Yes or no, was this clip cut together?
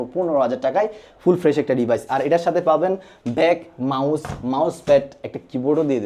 no